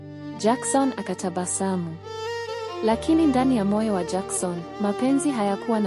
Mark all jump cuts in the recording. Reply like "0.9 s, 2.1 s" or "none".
none